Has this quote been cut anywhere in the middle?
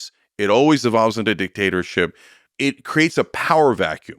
yes; 1 cut; at 2.4 s

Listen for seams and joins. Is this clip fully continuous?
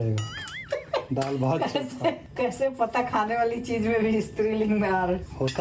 yes; 0 cuts

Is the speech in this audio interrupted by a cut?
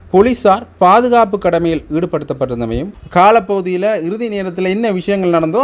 yes; 1 cut; at 2.9 s

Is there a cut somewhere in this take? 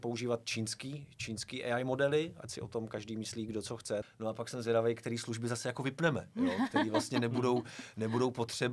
yes; 1 cut; at 4.0 s

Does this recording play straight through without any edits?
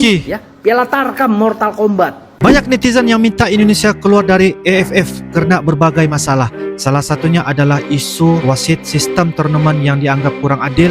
no; 1 cut; at 2.3 s

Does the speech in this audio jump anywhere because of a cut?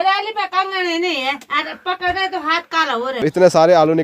yes; 1 cut; at 3.1 s

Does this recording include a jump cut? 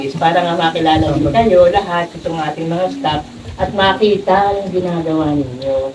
no; 0 cuts

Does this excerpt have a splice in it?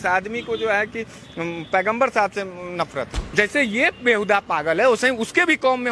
yes; 1 cut; at 3.2 s

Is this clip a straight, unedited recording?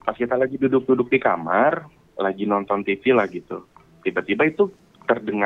yes; 0 cuts

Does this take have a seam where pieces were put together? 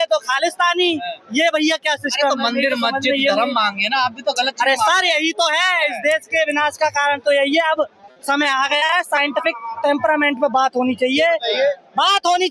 no; 0 cuts

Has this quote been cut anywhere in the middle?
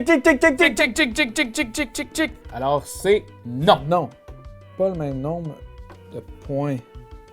yes; 1 cut; at 2.4 s

